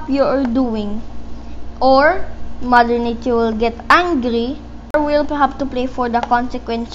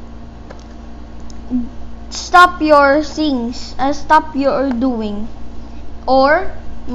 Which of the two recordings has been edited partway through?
first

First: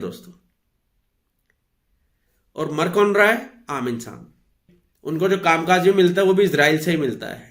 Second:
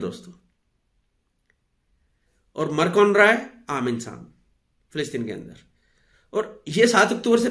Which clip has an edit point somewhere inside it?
first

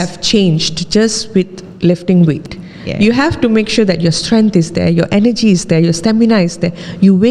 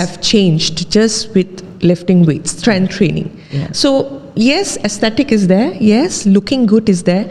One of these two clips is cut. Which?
first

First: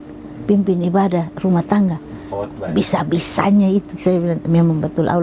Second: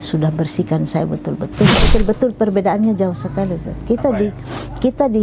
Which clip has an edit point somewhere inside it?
second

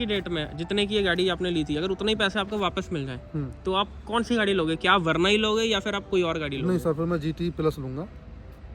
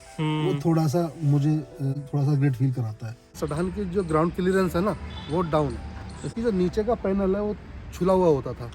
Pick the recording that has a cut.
second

